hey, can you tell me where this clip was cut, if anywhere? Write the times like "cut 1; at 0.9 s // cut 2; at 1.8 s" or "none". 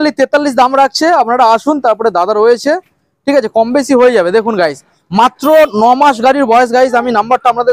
none